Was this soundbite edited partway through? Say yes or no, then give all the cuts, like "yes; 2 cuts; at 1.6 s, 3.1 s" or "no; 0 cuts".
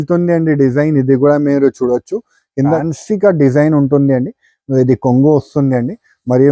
yes; 1 cut; at 2.8 s